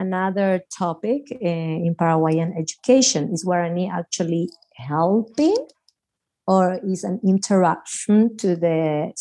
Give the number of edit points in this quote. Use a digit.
0